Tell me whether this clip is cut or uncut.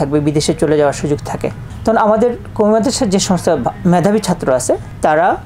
uncut